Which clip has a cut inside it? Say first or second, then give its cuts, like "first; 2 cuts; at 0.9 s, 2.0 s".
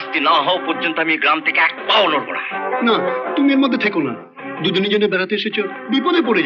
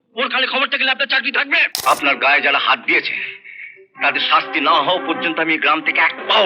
second; 1 cut; at 1.8 s